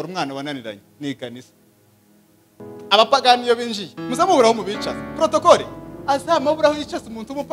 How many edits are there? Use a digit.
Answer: 1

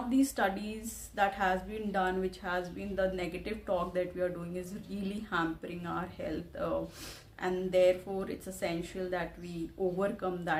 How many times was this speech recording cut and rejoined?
0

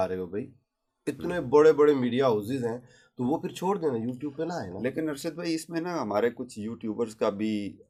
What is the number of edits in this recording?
0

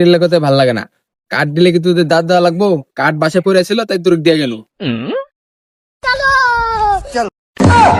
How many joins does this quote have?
0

